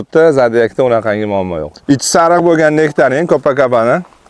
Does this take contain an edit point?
no; 0 cuts

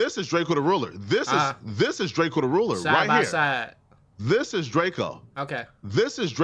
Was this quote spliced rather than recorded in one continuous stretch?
no; 0 cuts

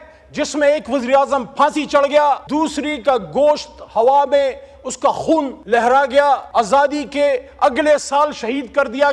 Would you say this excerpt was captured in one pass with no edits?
no; 3 cuts; at 2.4 s, 5.6 s, 6.5 s

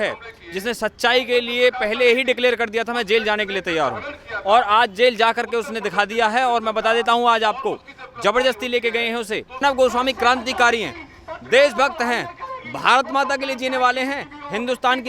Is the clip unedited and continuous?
no; 1 cut; at 9.6 s

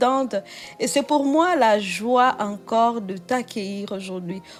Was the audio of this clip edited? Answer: no; 0 cuts

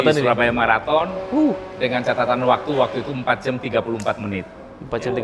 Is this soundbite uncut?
yes; 0 cuts

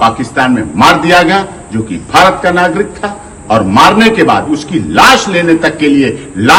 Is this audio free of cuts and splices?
yes; 0 cuts

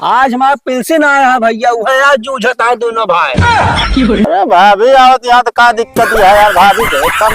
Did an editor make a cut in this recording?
yes; 1 cut; at 4.2 s

